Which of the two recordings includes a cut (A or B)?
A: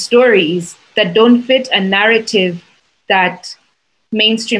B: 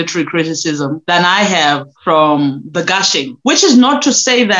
B